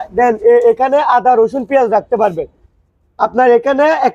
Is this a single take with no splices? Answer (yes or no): yes